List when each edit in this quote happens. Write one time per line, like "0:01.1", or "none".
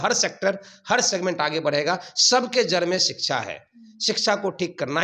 none